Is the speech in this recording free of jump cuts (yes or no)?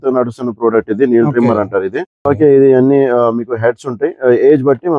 yes